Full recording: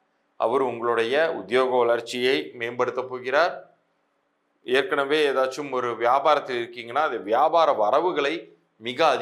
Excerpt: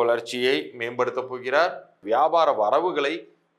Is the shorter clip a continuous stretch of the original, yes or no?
no